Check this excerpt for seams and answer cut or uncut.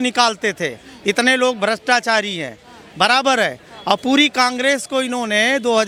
uncut